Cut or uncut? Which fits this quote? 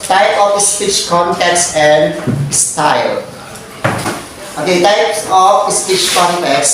cut